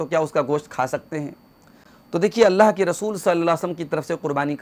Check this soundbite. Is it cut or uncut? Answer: uncut